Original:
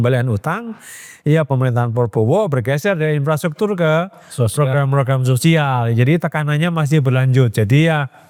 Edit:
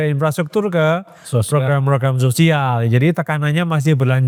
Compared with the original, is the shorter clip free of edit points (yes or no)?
yes